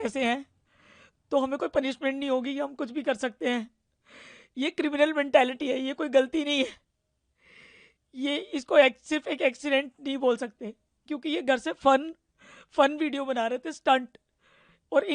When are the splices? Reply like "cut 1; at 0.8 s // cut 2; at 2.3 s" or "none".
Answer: none